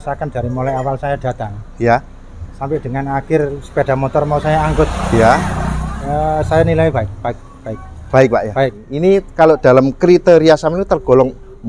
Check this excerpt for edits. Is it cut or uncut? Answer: cut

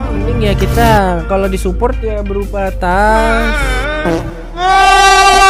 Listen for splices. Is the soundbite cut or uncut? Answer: uncut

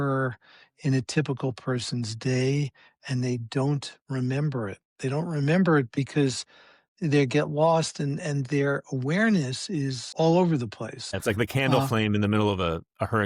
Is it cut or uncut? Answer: uncut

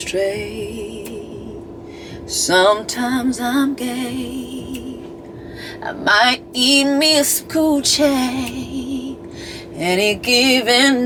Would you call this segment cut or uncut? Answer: uncut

